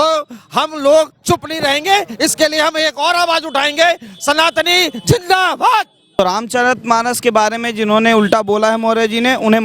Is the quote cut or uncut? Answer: cut